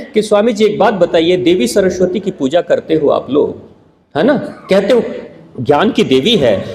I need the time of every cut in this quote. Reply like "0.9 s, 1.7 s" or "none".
none